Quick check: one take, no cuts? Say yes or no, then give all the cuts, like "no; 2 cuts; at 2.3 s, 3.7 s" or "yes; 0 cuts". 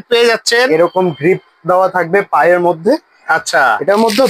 yes; 0 cuts